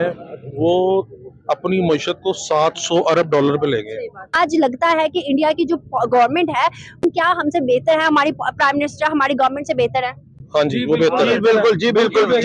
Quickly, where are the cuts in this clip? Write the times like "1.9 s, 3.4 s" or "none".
4.3 s, 7.0 s